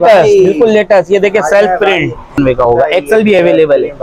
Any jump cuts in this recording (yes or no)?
yes